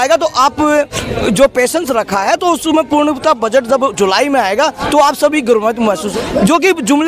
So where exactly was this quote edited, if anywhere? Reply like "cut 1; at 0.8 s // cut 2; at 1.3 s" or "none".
cut 1; at 6.1 s